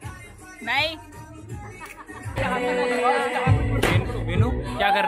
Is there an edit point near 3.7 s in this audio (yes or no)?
no